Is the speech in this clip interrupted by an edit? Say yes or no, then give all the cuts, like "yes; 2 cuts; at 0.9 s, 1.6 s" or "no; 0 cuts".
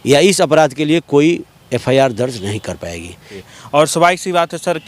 yes; 1 cut; at 3.4 s